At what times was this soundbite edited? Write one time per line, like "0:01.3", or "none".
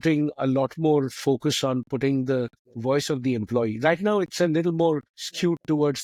none